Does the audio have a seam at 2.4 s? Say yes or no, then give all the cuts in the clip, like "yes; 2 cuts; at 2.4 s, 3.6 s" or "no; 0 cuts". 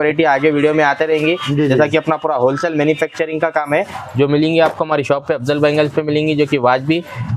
no; 1 cut; at 3.9 s